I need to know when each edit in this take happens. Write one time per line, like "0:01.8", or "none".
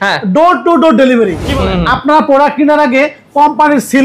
0:01.5